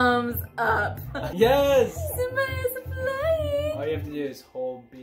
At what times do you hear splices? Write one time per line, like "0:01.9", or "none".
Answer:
0:01.3